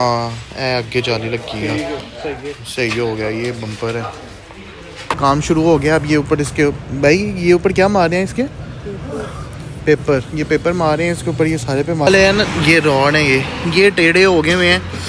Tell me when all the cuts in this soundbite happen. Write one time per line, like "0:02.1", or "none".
0:05.2
0:12.1